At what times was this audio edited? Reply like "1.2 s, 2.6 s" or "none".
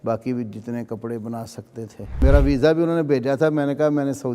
2.2 s